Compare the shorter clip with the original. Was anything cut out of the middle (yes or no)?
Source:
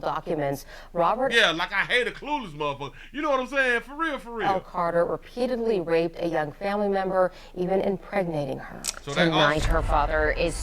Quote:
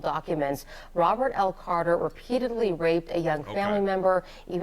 yes